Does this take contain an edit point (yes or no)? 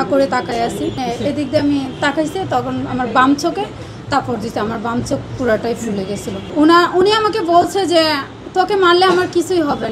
yes